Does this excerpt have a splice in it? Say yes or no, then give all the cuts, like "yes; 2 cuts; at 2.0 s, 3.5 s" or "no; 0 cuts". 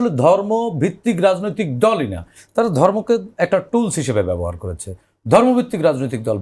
no; 0 cuts